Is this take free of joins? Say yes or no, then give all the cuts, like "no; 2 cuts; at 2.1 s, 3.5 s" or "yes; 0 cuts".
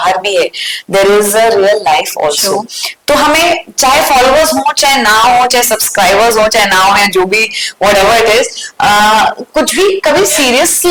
yes; 0 cuts